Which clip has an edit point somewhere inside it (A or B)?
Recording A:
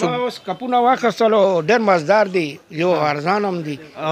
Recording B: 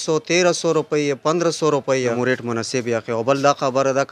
B